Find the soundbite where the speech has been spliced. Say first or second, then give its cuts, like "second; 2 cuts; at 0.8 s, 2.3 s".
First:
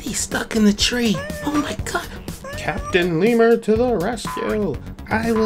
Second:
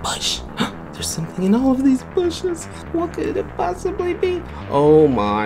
second; 2 cuts; at 1.1 s, 2.7 s